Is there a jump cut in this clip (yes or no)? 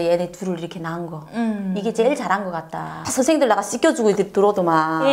yes